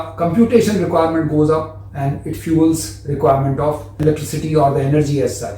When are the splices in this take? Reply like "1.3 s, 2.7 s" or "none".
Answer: 4.0 s